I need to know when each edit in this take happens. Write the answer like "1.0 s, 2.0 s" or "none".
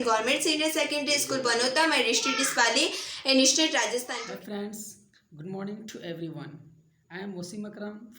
4.1 s